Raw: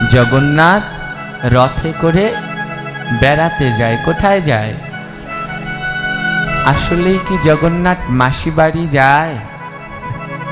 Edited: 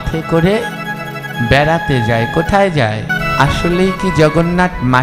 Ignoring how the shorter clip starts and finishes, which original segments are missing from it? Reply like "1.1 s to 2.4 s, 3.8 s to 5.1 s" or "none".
4.8 s to 6.4 s